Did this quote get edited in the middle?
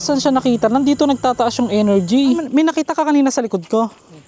yes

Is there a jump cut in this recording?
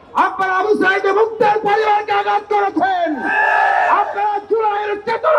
no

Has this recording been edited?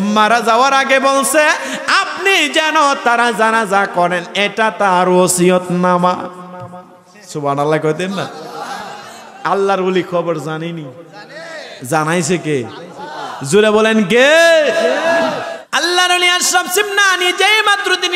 yes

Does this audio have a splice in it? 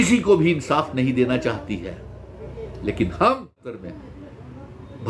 yes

